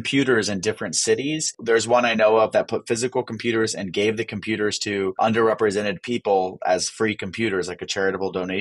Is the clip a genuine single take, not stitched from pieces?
no; 2 cuts; at 1.5 s, 5.2 s

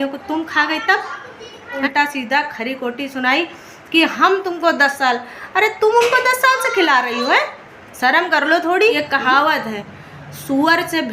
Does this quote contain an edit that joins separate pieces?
yes; 2 cuts; at 1.8 s, 9.0 s

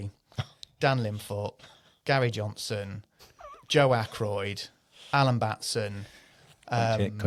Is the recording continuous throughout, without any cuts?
yes; 0 cuts

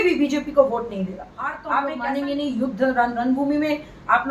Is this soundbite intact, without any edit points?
no; 1 cut; at 1.6 s

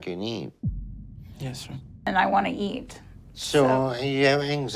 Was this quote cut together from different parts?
yes; 1 cut; at 1.9 s

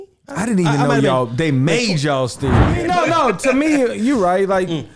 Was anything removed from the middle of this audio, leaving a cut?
yes; 1 cut; at 2.8 s

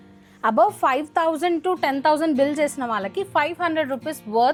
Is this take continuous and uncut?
yes; 0 cuts

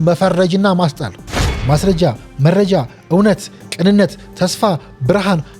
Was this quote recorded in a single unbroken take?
no; 1 cut; at 1.5 s

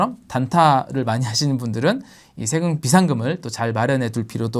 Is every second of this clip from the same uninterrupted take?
yes; 0 cuts

